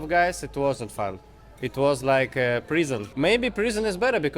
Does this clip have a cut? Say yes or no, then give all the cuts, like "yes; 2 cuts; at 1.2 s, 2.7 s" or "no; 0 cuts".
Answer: yes; 1 cut; at 3.1 s